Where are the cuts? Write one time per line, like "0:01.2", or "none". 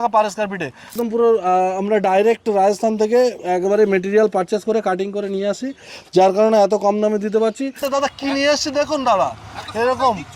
0:00.9
0:07.8